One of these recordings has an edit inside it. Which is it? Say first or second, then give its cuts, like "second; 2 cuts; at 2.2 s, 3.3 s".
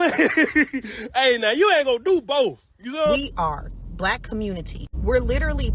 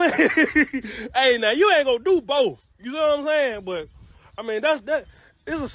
first; 1 cut; at 3.2 s